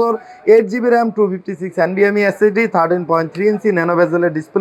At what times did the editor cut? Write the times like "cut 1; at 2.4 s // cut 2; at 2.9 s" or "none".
none

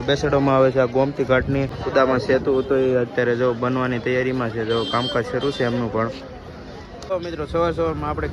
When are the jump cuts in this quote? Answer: cut 1; at 1.8 s // cut 2; at 6.9 s

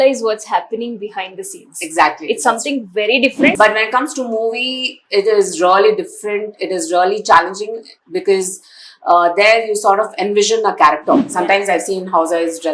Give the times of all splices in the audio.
cut 1; at 3.5 s // cut 2; at 11.3 s

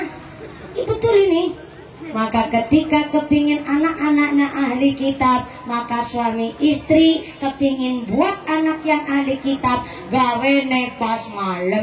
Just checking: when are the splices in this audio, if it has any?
none

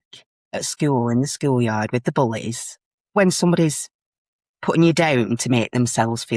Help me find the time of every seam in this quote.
cut 1; at 3.1 s

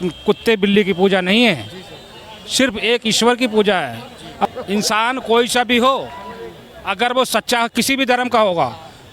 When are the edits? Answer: cut 1; at 4.1 s

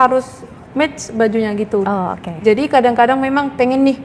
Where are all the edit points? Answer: none

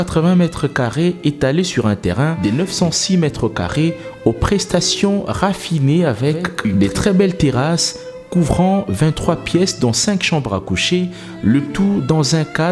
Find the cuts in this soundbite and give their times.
none

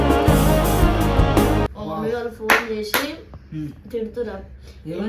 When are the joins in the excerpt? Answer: cut 1; at 1.8 s

